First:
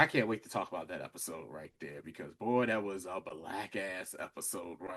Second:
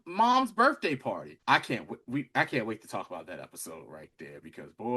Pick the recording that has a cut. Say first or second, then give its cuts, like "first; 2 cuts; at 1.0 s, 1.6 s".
second; 1 cut; at 1.3 s